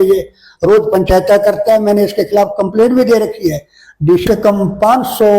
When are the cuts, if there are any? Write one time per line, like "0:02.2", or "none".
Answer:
0:04.2